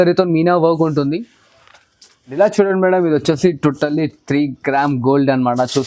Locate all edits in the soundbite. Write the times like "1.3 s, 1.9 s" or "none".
2.2 s